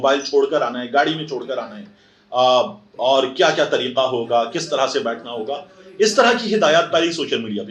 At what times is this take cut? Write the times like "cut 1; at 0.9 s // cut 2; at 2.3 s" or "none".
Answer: none